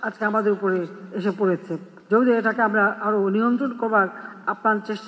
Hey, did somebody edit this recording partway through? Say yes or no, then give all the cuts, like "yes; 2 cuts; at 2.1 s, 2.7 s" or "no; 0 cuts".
no; 0 cuts